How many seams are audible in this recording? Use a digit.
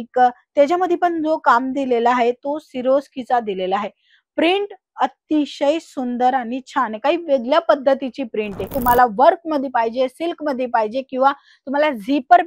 1